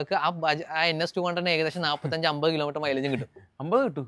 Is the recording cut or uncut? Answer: uncut